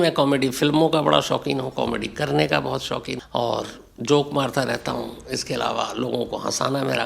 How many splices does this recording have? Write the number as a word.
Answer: one